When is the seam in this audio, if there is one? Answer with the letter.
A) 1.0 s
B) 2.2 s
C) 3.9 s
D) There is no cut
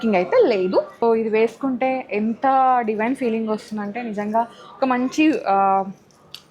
A